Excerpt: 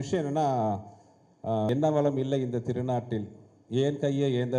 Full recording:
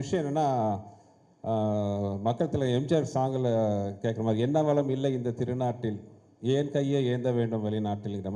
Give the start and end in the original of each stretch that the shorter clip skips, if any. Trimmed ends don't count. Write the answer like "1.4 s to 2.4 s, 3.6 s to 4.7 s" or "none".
1.7 s to 4.4 s

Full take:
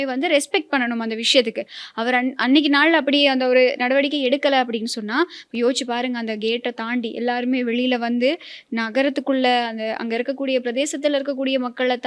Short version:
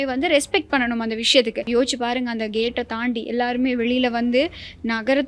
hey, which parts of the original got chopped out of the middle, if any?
1.6 s to 5.5 s

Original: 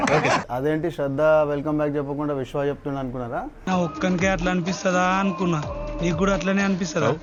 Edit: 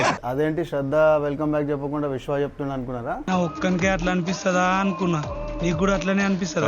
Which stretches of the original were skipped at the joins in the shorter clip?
3.5 s to 3.6 s

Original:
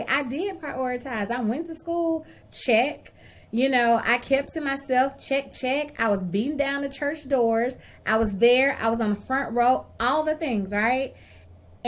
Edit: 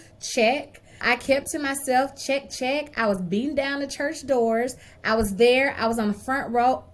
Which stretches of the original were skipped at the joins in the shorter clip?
3.3 s to 4.0 s

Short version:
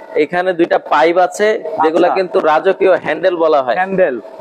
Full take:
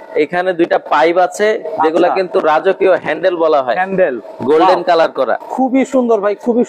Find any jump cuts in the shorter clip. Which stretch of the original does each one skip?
none

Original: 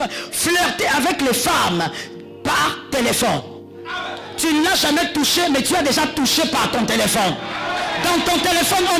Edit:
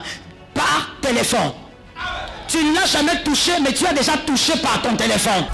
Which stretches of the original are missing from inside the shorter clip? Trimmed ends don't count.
none

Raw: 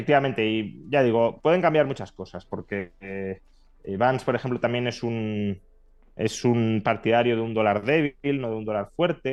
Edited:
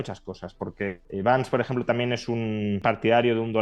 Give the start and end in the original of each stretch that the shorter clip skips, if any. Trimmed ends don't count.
2.9 s to 3.8 s, 5.6 s to 6.8 s

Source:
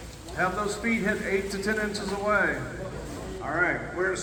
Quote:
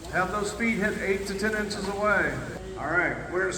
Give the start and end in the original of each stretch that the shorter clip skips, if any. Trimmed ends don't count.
2.8 s to 3.2 s

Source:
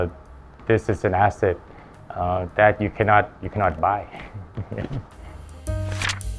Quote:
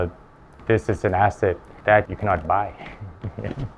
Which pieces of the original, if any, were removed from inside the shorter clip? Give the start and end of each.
2.0 s to 3.4 s

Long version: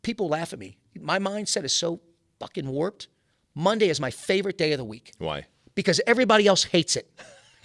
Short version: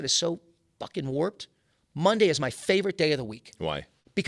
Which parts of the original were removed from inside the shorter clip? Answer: none

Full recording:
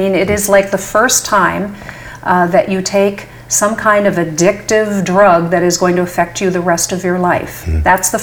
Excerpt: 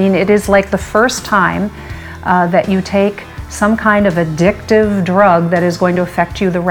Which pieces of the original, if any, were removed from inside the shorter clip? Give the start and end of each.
none

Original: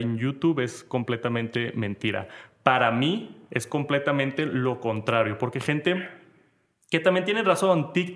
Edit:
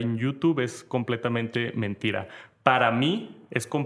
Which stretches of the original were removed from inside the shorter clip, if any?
none

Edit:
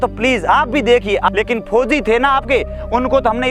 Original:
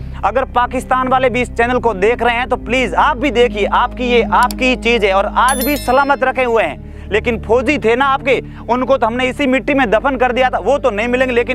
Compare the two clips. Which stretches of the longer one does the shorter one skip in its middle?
3.7 s to 7.0 s

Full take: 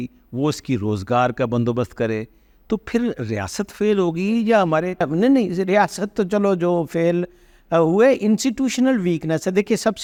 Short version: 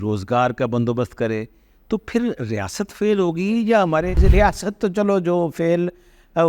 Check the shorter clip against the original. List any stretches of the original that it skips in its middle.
4.9 s to 5.5 s

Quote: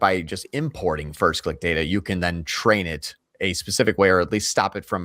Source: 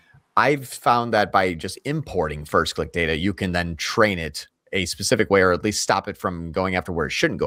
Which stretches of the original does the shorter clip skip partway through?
none

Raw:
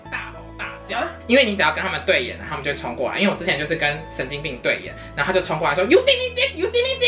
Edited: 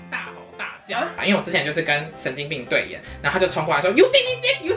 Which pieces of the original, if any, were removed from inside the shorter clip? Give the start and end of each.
1.2 s to 3.1 s

